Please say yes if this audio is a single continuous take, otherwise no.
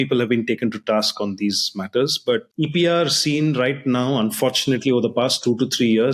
no